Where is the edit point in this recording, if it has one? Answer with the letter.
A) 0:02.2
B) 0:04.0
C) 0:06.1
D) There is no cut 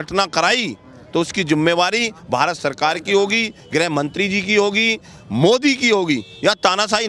D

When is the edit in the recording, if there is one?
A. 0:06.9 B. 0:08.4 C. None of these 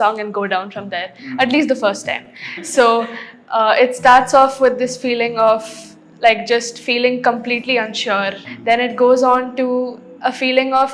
B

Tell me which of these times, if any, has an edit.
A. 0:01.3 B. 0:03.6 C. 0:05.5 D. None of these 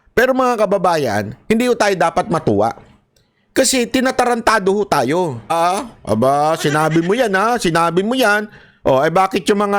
C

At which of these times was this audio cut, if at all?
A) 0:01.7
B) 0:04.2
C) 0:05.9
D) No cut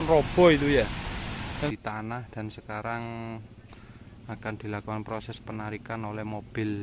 A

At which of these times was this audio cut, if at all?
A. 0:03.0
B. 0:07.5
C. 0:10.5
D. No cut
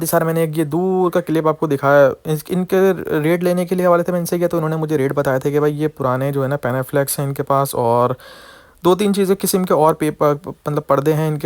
D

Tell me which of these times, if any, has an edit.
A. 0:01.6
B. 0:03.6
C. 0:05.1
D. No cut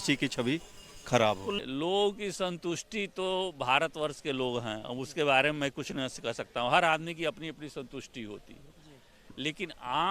A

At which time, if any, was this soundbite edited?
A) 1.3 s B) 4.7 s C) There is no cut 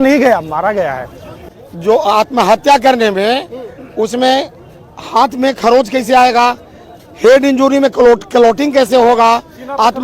A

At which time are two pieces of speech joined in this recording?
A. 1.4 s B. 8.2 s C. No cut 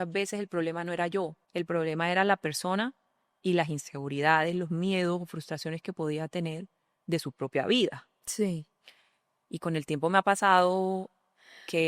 A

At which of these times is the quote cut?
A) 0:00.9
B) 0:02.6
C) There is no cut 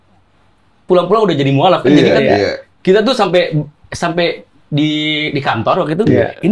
C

